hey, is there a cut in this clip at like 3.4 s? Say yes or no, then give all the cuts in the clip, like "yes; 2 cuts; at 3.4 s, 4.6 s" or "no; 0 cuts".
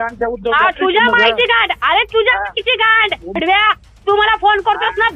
yes; 1 cut; at 3.4 s